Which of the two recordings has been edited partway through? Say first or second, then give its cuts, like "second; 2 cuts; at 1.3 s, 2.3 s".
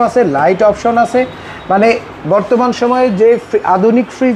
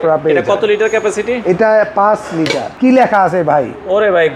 second; 1 cut; at 2.6 s